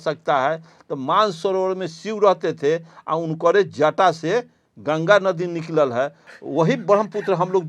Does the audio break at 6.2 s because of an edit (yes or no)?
no